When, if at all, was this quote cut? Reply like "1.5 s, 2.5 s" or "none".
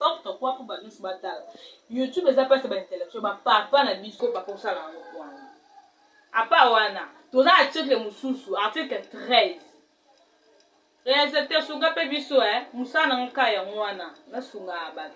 4.1 s